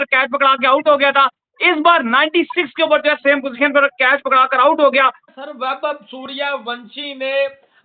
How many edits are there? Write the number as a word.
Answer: one